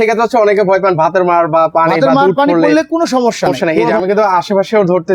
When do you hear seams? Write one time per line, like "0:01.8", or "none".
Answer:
0:03.5